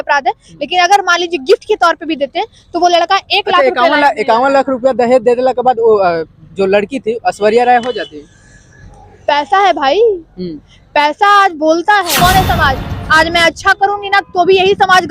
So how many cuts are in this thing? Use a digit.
1